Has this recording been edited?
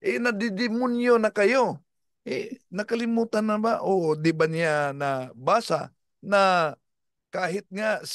no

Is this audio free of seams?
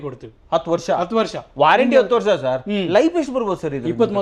yes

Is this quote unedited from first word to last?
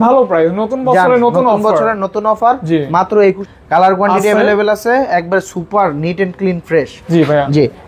no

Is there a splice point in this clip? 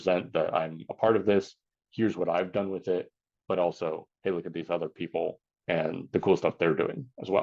yes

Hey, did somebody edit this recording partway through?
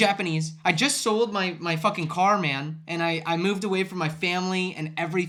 no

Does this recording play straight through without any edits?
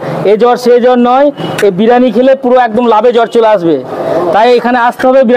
yes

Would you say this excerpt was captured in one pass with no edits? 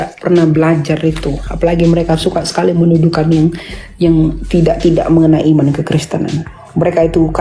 yes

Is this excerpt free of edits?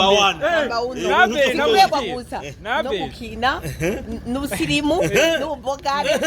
no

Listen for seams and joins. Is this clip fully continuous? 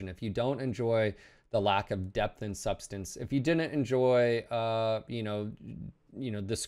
yes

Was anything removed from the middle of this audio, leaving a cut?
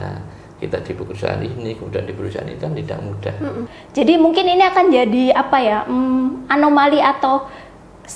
yes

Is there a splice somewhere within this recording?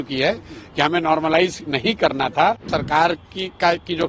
yes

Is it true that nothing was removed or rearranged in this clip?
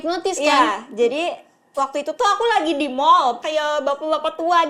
no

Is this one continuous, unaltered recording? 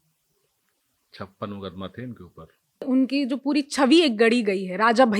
no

